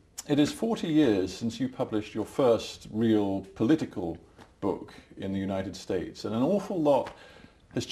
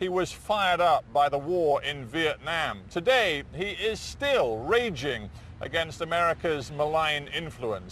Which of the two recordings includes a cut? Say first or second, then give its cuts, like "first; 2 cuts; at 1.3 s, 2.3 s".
second; 1 cut; at 3.0 s